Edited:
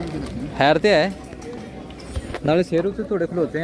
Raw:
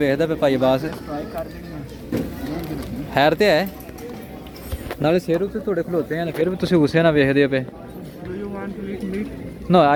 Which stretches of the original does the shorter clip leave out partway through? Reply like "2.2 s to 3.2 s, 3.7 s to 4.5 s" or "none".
none